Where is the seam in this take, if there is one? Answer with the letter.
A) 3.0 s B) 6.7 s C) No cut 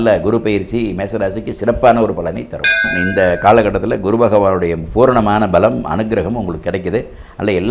A